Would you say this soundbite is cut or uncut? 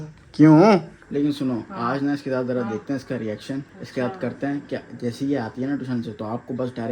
cut